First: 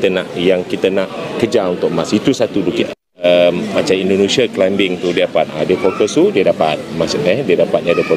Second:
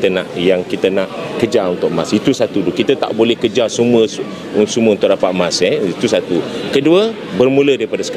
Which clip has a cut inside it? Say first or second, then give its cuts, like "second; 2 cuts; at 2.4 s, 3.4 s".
first; 1 cut; at 2.8 s